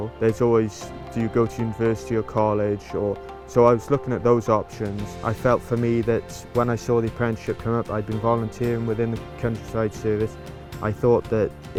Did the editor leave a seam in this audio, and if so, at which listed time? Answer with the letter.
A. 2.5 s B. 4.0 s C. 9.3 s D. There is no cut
D